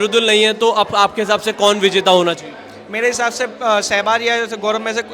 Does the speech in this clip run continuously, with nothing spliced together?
yes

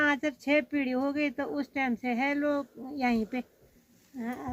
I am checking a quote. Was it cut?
no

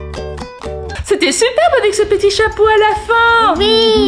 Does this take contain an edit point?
no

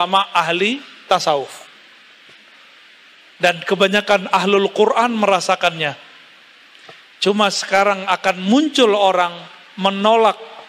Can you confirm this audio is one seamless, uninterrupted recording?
yes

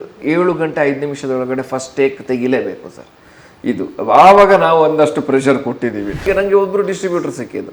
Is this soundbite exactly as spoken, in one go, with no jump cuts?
no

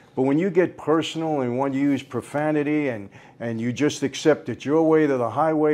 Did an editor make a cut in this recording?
no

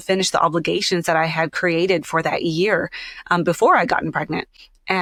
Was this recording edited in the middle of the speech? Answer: no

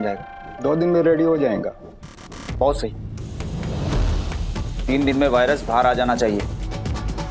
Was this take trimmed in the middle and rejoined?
no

